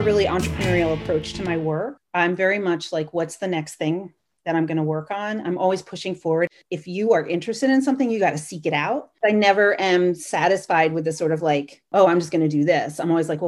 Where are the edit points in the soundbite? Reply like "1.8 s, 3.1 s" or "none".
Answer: 6.5 s, 9.1 s